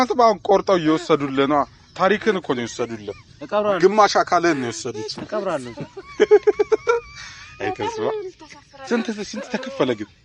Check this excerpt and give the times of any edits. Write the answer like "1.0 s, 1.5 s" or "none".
none